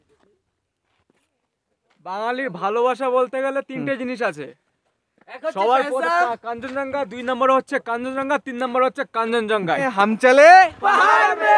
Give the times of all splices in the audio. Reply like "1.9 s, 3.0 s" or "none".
9.9 s